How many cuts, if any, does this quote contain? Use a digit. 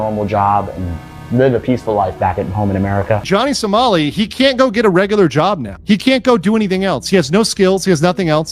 1